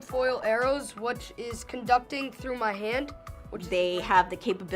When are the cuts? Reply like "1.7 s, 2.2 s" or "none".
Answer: 3.6 s